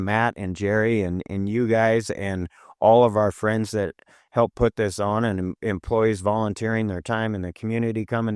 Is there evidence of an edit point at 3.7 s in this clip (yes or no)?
no